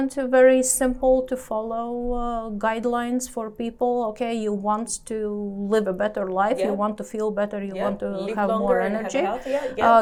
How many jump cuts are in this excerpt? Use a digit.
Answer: 0